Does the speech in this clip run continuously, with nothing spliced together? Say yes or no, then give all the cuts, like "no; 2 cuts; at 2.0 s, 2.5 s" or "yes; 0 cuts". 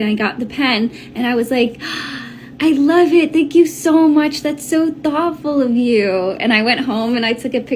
no; 1 cut; at 6.2 s